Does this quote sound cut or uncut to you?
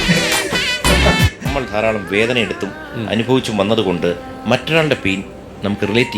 cut